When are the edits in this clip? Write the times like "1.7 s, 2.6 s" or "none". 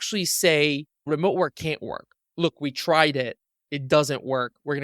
0.9 s